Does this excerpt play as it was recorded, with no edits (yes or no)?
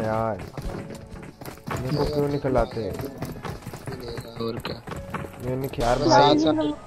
no